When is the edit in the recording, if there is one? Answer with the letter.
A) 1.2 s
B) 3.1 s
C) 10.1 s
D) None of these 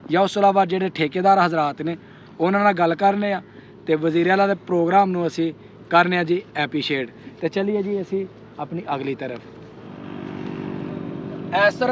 C